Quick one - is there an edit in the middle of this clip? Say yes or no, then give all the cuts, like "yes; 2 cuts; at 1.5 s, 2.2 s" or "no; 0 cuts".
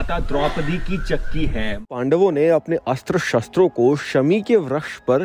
yes; 1 cut; at 1.9 s